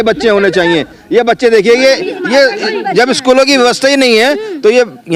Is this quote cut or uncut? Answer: uncut